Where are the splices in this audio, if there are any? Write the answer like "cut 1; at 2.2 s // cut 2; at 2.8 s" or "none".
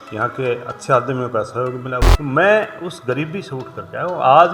cut 1; at 2.1 s